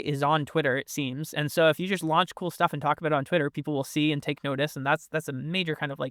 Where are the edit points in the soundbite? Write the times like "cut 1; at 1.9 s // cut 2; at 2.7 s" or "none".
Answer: none